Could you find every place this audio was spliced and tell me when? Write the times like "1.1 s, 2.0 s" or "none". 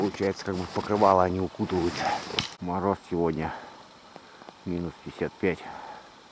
2.4 s